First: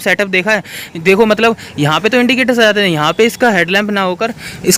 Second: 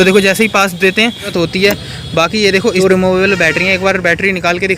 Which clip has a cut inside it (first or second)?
second